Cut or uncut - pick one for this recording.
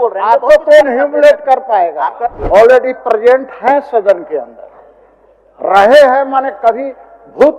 cut